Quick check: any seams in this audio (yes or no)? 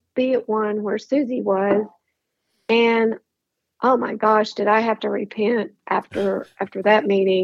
no